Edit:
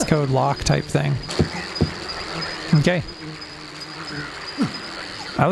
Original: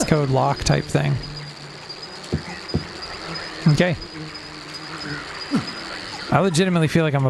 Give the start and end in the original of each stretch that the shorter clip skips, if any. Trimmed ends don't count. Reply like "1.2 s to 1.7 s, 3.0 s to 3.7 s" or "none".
1.3 s to 2.2 s